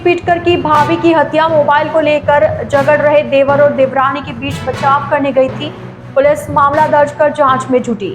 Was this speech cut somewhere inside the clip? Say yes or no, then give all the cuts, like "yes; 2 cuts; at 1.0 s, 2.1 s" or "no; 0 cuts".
no; 0 cuts